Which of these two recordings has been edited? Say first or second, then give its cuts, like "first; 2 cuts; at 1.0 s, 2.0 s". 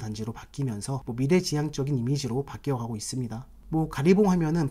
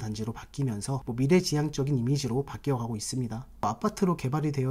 second; 1 cut; at 3.6 s